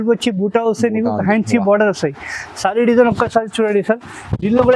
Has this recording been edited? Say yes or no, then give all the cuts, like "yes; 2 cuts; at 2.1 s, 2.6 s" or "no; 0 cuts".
no; 0 cuts